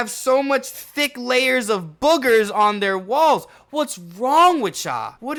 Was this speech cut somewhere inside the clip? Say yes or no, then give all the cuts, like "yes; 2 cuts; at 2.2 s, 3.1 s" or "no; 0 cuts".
no; 0 cuts